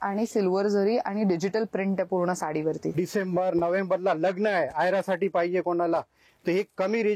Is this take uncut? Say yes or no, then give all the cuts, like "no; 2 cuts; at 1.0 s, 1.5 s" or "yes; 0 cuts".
no; 1 cut; at 2.9 s